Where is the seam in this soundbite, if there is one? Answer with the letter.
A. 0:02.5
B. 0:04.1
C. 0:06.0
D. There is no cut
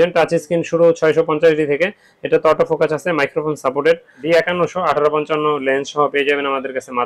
B